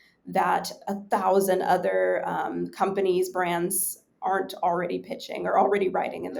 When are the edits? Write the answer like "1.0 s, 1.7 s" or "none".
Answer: none